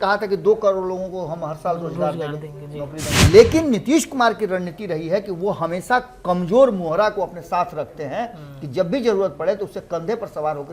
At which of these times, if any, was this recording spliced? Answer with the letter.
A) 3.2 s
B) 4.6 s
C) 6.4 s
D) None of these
A